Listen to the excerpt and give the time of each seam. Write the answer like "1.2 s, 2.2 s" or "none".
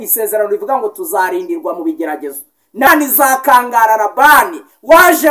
2.9 s